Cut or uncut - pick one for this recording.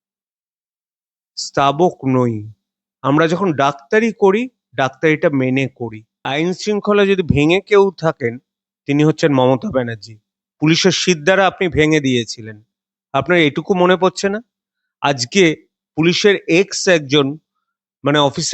cut